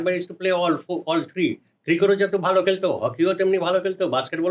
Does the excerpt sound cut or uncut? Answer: uncut